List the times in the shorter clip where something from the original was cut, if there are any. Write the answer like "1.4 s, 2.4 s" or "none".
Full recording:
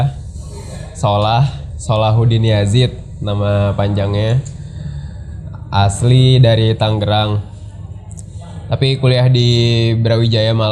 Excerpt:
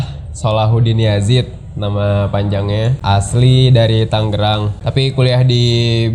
3.0 s, 4.8 s